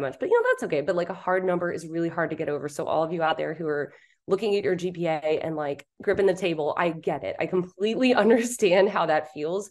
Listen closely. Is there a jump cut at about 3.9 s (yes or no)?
no